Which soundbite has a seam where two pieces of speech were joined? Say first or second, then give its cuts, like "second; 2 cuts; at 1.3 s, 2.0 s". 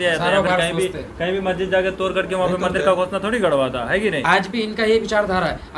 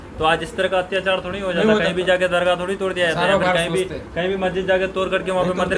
first; 1 cut; at 4.2 s